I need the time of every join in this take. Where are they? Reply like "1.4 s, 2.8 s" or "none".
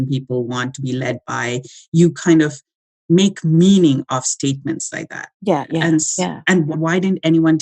6.7 s